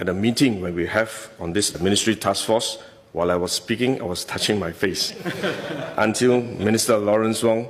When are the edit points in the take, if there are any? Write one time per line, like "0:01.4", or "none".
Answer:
none